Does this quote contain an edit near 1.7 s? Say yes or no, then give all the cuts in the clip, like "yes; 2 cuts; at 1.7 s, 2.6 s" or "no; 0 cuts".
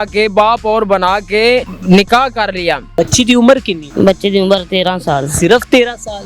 yes; 3 cuts; at 1.7 s, 2.9 s, 3.8 s